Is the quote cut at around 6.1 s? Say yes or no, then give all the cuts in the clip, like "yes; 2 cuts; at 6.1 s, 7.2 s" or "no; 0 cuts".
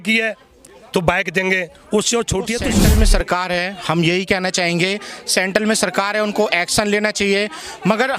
no; 1 cut; at 2.9 s